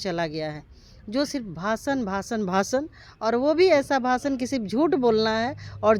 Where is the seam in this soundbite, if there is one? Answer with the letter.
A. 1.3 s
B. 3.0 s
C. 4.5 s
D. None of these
D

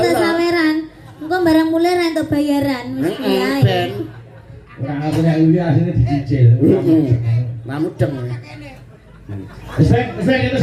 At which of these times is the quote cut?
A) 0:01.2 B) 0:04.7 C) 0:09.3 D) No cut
D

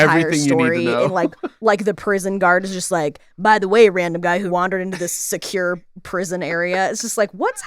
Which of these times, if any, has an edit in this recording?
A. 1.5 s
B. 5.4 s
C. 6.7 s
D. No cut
A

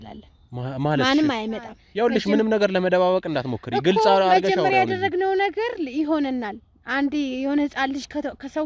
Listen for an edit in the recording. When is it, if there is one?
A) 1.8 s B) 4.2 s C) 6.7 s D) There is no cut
A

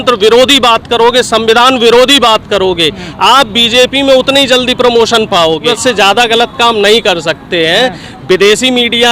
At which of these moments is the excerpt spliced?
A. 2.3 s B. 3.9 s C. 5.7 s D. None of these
C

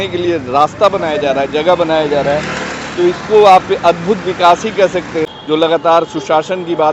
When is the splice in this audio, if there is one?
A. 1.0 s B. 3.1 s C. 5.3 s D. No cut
C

